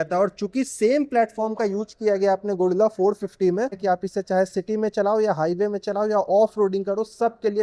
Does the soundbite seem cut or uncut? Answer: cut